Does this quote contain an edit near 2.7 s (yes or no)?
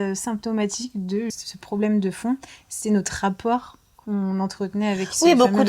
no